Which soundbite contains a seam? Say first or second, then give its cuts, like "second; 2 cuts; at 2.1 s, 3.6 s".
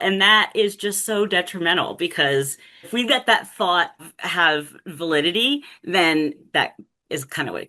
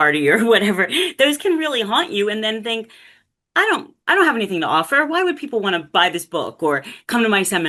first; 3 cuts; at 2.9 s, 4.2 s, 6.4 s